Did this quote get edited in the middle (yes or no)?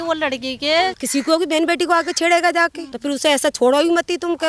yes